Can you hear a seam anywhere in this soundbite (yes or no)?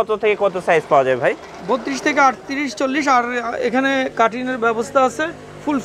no